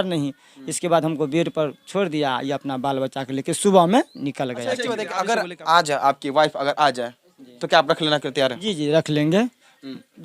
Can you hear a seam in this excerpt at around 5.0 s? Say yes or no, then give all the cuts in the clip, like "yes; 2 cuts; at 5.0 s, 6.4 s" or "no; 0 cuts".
yes; 1 cut; at 5.0 s